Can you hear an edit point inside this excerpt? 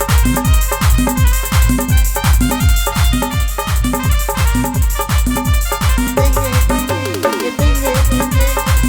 no; 0 cuts

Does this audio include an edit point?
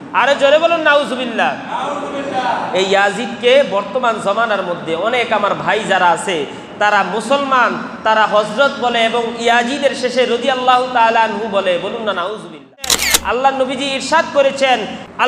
yes; 1 cut; at 13.1 s

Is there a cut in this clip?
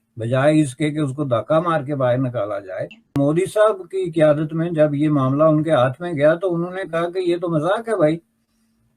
yes; 1 cut; at 3.0 s

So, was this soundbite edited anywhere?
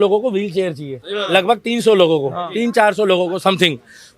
no; 0 cuts

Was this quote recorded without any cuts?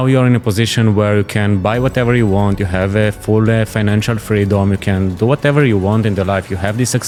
yes; 0 cuts

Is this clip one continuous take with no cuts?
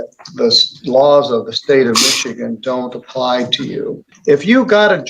no; 1 cut; at 4.0 s

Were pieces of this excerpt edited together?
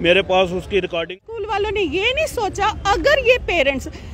yes; 1 cut; at 1.1 s

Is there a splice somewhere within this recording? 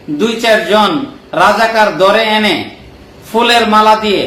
no; 0 cuts

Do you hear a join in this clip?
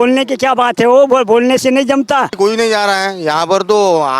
yes; 1 cut; at 2.3 s

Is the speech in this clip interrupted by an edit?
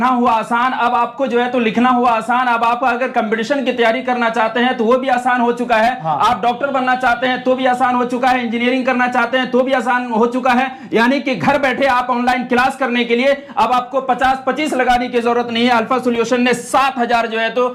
no; 0 cuts

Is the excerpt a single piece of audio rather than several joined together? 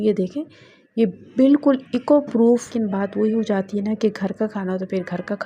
no; 1 cut; at 2.7 s

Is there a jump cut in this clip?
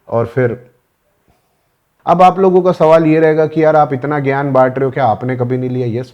yes; 1 cut; at 1.9 s

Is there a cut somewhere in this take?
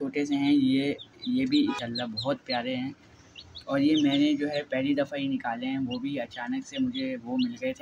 yes; 1 cut; at 1.8 s

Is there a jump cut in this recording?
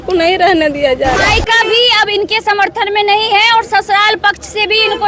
yes; 1 cut; at 1.2 s

